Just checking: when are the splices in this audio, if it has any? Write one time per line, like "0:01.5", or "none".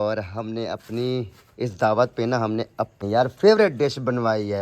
0:03.0